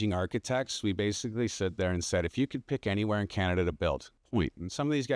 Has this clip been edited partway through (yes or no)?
yes